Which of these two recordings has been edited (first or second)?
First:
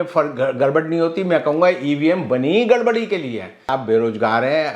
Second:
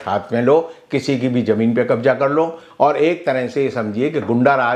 first